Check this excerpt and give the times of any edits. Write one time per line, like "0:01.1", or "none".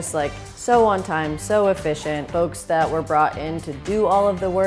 0:02.3